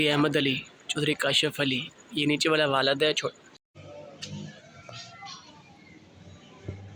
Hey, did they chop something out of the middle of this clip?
yes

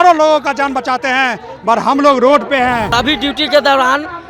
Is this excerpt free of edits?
no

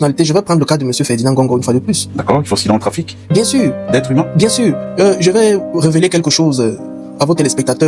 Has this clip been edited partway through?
no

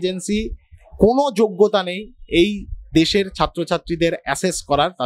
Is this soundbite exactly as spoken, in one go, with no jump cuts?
yes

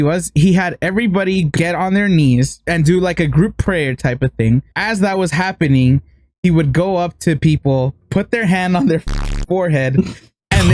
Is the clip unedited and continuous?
no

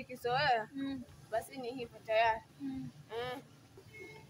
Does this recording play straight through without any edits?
yes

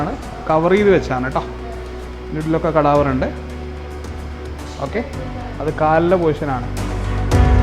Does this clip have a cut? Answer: no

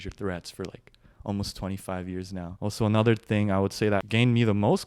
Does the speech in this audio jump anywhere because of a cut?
yes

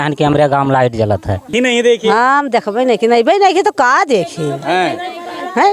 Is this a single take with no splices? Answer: no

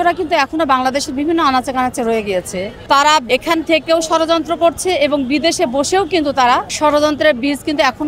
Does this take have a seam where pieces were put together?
yes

